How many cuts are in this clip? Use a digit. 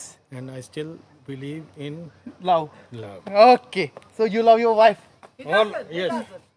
0